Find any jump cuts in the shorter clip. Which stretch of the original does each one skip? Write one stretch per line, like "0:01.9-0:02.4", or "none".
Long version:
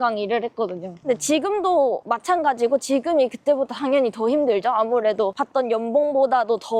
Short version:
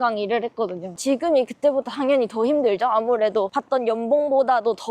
0:01.0-0:02.8